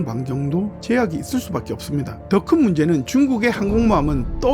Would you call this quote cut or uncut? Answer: cut